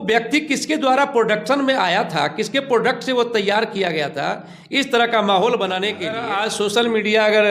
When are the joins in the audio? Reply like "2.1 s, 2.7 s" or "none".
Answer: 6.1 s